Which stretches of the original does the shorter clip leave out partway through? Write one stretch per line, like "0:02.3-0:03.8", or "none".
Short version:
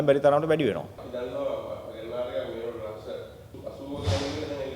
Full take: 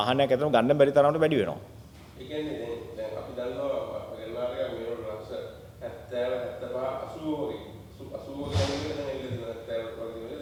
0:01.7-0:03.2
0:05.6-0:07.9